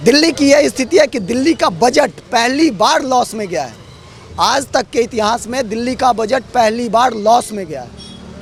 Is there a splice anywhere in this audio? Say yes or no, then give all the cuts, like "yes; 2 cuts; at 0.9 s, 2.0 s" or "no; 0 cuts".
no; 0 cuts